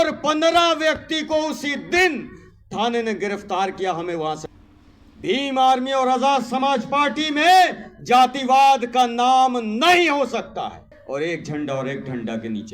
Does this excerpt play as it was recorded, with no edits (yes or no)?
no